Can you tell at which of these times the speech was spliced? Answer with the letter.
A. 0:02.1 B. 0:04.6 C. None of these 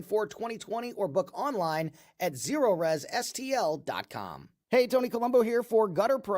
B